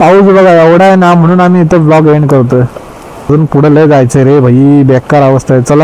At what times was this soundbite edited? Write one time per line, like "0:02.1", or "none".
0:03.3